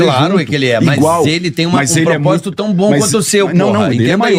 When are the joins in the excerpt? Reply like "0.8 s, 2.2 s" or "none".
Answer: none